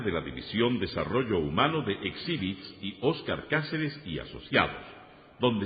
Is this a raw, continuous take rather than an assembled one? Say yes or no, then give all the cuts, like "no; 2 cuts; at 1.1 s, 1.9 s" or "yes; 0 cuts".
yes; 0 cuts